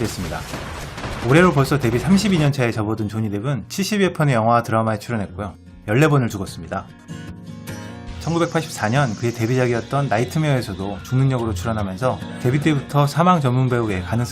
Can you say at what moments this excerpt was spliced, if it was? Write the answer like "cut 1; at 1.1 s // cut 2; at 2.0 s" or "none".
cut 1; at 2.5 s